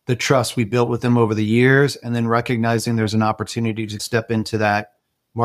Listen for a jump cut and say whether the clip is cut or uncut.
cut